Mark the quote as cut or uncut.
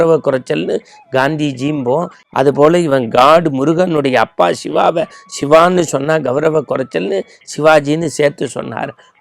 cut